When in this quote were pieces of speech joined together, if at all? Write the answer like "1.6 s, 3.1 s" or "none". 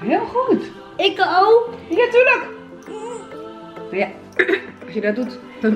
none